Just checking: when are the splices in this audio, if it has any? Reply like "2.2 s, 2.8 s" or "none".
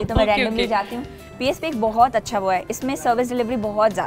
1.2 s